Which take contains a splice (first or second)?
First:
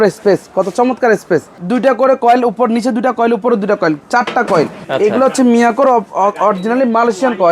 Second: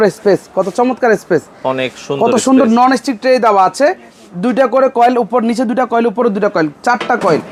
first